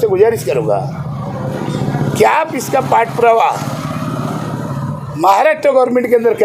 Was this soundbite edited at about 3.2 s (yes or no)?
no